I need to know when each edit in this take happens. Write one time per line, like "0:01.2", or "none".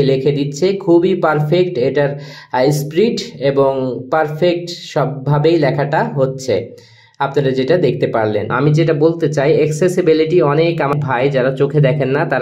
0:08.5
0:11.0